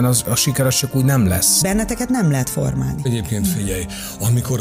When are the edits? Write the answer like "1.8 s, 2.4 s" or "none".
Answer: 1.6 s, 3.1 s